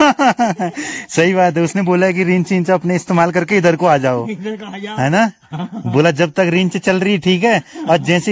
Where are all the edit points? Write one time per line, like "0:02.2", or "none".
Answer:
none

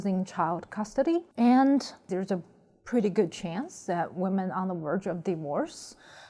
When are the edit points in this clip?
0:01.3
0:02.0

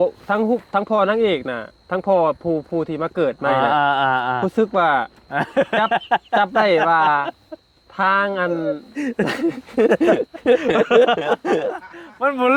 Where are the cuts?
none

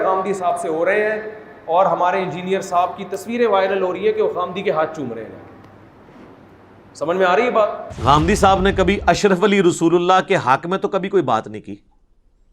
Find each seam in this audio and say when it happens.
0:07.9

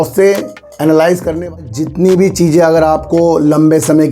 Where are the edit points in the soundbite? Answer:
0:01.6

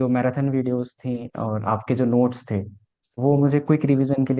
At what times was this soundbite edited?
none

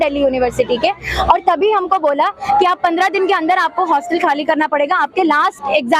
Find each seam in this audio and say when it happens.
none

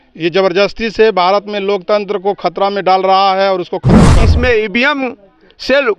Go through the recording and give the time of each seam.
0:04.0

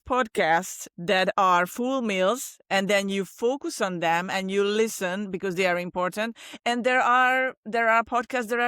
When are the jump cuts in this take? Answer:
none

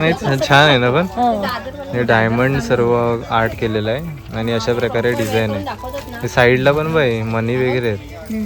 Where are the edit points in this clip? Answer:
none

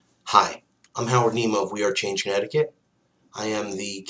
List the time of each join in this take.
0:02.6

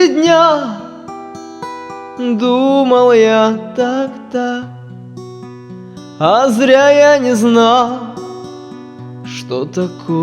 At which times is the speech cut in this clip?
0:06.2
0:08.1
0:09.5

